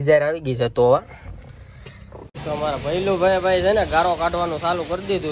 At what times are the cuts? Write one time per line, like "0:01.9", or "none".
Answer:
0:02.3
0:04.1